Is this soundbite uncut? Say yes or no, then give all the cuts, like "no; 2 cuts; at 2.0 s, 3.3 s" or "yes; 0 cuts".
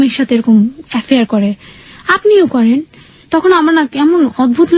yes; 0 cuts